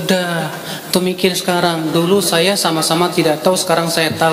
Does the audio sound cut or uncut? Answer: uncut